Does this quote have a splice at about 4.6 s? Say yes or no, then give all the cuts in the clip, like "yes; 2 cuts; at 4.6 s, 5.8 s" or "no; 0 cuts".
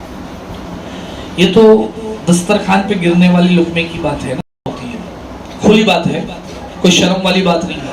yes; 1 cut; at 4.6 s